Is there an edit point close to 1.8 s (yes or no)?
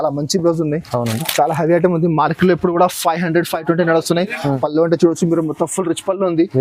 no